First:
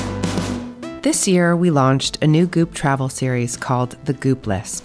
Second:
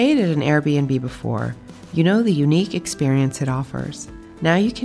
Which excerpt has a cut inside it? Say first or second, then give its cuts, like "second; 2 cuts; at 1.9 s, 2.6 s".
first; 1 cut; at 0.9 s